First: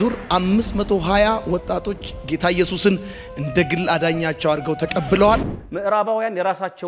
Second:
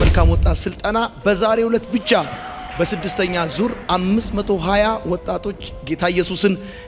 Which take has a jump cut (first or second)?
first